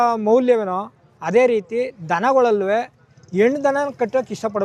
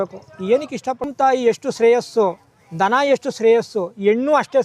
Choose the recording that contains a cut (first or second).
second